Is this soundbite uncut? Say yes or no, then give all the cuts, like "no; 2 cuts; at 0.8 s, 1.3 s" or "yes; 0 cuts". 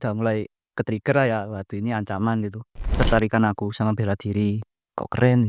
no; 1 cut; at 2.9 s